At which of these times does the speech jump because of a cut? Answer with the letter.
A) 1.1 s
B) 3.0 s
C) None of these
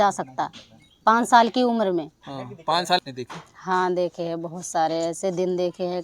B